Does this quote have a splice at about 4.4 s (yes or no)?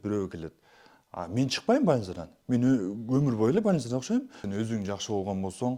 yes